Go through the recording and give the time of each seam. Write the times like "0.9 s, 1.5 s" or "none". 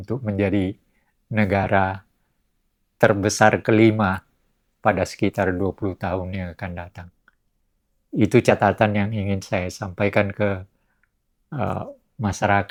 none